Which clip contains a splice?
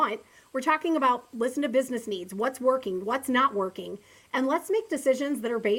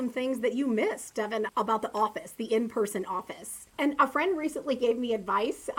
second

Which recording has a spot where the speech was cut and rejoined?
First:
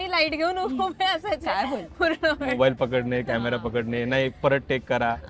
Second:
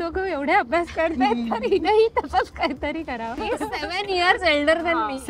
second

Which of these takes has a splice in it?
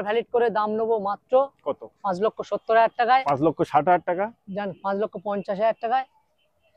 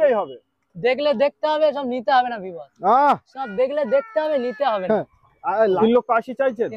second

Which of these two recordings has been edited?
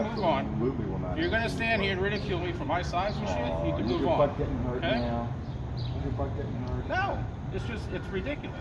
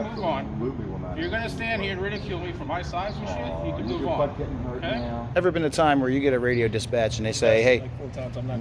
second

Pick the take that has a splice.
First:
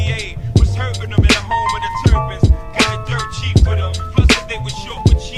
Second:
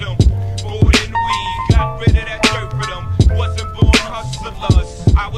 second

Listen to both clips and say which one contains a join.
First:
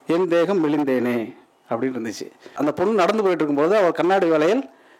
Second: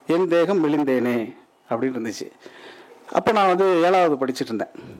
first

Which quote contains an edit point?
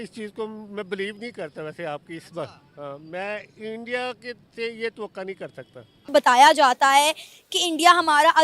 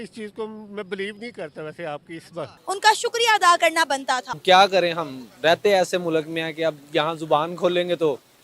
second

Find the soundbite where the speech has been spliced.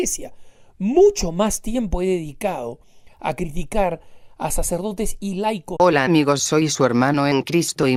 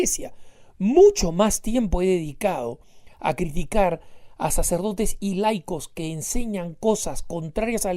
second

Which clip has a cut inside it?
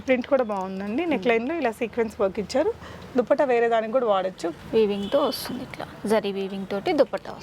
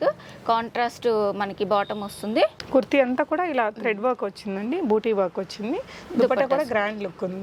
first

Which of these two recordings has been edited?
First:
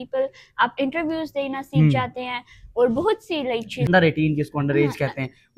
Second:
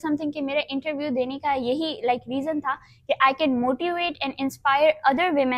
first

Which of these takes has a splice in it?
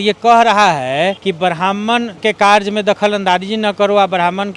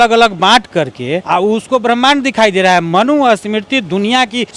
first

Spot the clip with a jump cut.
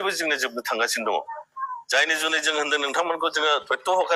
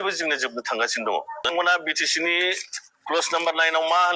second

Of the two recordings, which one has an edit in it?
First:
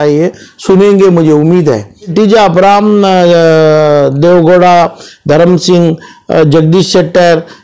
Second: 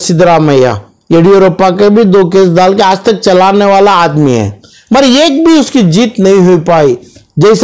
first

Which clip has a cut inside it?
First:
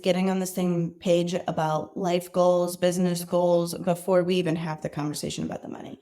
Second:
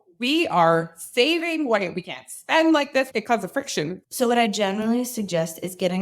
second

